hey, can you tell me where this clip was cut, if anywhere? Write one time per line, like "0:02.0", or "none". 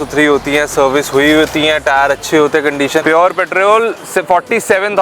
0:03.0